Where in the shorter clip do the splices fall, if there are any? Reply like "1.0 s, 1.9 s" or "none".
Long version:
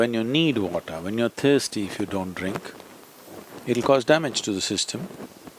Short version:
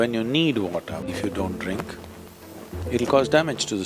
1.1 s